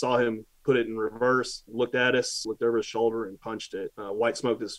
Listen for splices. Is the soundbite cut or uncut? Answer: cut